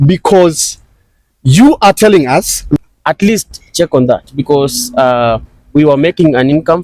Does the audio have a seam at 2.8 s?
yes; 1 cut; at 2.8 s

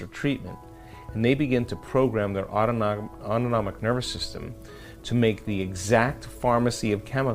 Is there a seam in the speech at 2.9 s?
yes; 1 cut; at 2.9 s

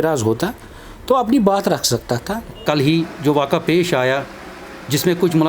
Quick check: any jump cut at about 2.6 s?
yes; 1 cut; at 2.6 s

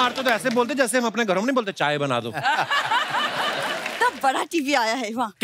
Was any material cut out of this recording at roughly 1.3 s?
no; 1 cut; at 3.9 s

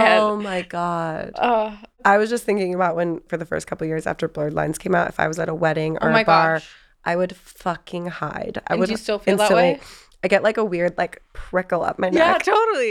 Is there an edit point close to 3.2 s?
yes; 2 cuts; at 1.8 s, 3.2 s

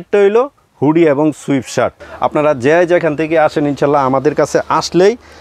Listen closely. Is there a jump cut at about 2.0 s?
yes; 1 cut; at 2.0 s

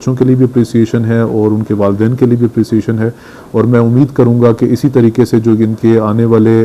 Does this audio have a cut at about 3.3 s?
no; 0 cuts

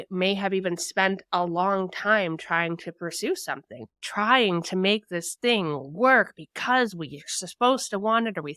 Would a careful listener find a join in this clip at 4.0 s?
yes; 1 cut; at 4.0 s

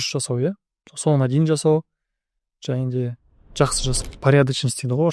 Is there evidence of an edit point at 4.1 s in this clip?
yes; 1 cut; at 4.1 s

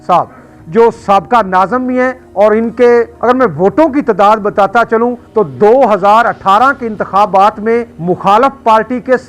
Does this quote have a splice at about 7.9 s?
yes; 4 cuts; at 2.2 s, 3.1 s, 5.2 s, 7.9 s

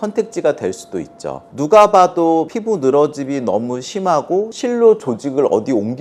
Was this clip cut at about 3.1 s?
no; 1 cut; at 1.5 s

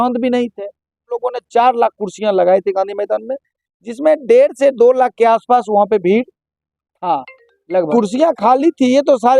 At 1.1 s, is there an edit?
yes; 2 cuts; at 1.1 s, 7.9 s

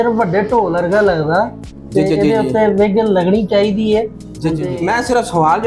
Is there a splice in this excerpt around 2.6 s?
no; 1 cut; at 4.5 s

